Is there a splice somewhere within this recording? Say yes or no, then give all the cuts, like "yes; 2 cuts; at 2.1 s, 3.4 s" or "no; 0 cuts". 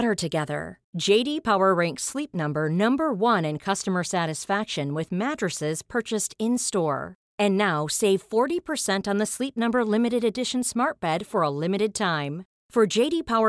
no; 0 cuts